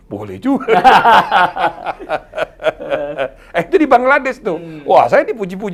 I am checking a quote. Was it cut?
no; 0 cuts

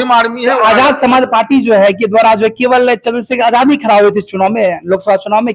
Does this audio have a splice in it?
no; 0 cuts

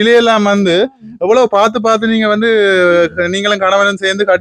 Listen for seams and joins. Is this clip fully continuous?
yes; 0 cuts

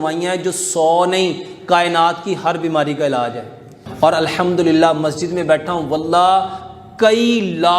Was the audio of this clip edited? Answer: yes; 1 cut; at 3.8 s

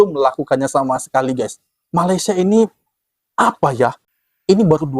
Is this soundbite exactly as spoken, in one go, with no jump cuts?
no; 1 cut; at 4.1 s

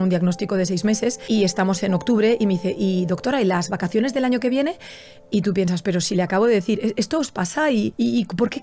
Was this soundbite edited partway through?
no; 0 cuts

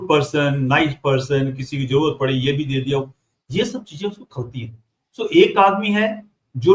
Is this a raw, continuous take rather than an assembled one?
yes; 0 cuts

